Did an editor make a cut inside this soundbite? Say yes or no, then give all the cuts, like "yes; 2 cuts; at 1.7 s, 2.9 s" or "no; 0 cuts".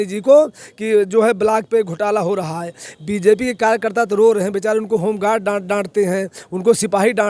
no; 0 cuts